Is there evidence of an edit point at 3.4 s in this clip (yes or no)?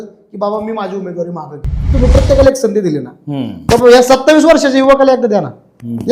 no